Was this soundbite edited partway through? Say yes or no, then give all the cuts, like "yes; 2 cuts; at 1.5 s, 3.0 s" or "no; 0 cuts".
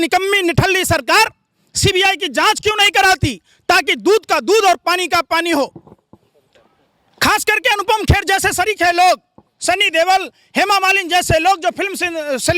no; 0 cuts